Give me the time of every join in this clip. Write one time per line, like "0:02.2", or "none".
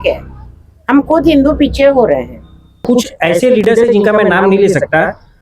0:02.8